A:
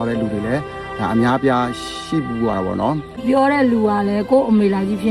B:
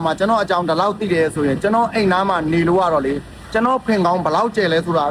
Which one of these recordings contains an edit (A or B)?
A